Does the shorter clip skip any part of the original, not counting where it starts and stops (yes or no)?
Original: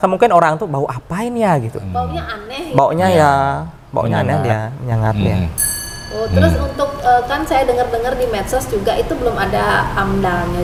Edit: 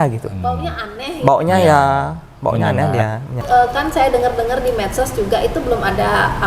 yes